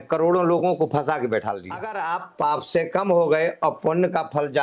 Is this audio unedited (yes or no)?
no